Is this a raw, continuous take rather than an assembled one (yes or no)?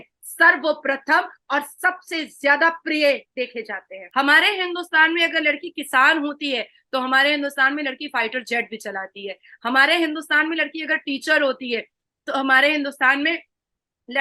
no